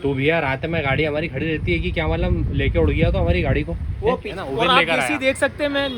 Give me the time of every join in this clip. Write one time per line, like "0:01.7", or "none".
0:04.3